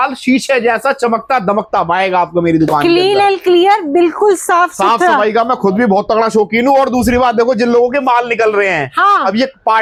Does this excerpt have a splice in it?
no; 0 cuts

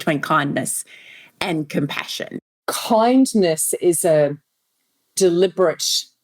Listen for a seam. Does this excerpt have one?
yes; 1 cut; at 2.5 s

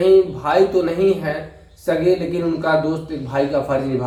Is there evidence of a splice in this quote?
no; 0 cuts

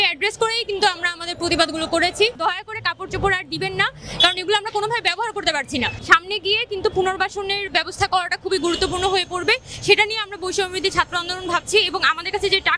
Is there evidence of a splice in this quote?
yes; 2 cuts; at 2.4 s, 6.0 s

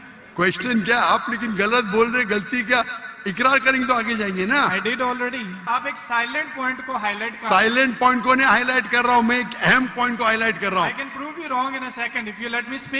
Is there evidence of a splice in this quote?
yes; 1 cut; at 5.7 s

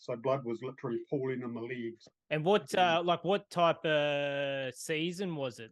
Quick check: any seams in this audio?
yes; 1 cut; at 2.1 s

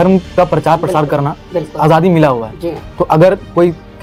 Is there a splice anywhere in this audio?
no; 0 cuts

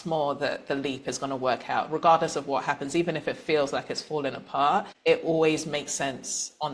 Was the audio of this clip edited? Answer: yes; 1 cut; at 4.9 s

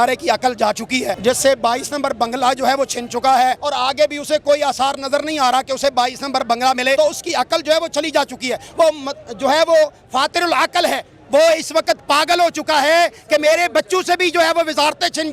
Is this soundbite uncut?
no; 3 cuts; at 1.1 s, 3.6 s, 7.0 s

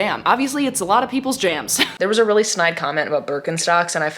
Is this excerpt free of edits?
no; 1 cut; at 1.9 s

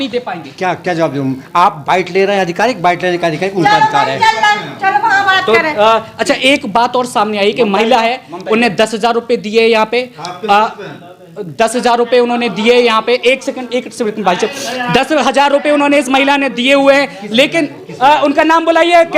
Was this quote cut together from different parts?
no; 0 cuts

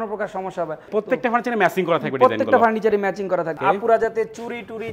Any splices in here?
yes; 2 cuts; at 0.8 s, 3.5 s

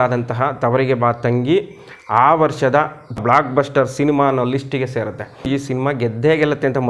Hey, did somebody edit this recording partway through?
yes; 2 cuts; at 3.2 s, 5.5 s

